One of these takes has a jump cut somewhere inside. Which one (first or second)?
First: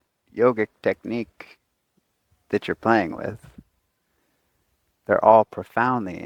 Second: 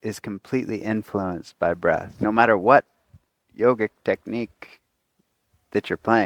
second